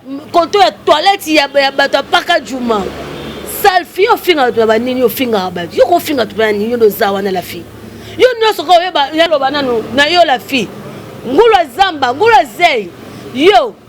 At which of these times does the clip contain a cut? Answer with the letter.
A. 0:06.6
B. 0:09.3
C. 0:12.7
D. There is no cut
B